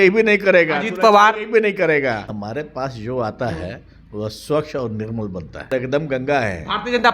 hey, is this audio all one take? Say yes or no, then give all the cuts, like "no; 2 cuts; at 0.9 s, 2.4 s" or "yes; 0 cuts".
no; 2 cuts; at 2.3 s, 5.6 s